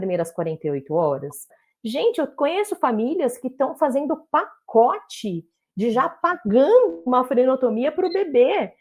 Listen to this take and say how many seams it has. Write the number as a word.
one